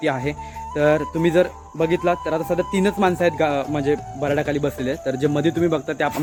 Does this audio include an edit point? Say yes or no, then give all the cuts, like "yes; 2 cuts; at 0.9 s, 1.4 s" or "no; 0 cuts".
no; 0 cuts